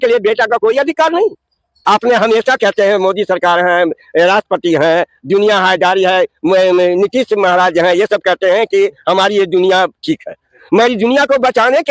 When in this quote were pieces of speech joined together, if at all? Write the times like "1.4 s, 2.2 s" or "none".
none